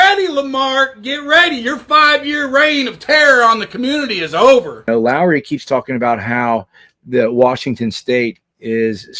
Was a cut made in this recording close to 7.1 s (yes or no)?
no